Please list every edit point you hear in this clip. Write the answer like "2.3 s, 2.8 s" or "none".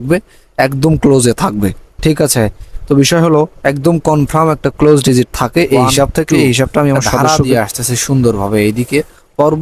7.1 s